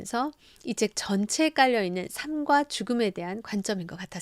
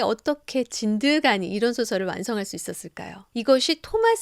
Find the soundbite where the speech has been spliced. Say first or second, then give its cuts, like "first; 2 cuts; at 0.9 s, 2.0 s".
second; 1 cut; at 3.2 s